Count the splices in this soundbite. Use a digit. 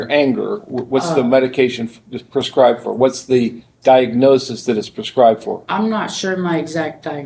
0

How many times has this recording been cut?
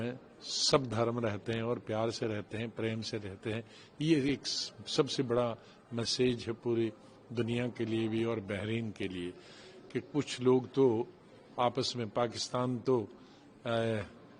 0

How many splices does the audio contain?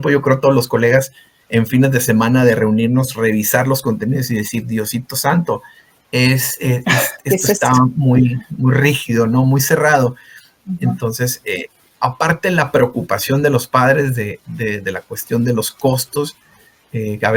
0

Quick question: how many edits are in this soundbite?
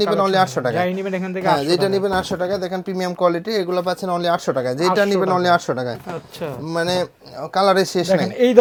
0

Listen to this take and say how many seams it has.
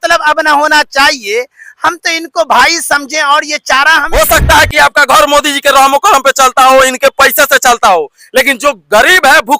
1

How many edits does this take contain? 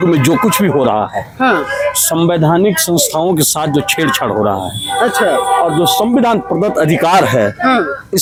0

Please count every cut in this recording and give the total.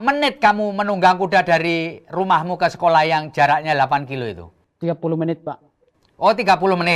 0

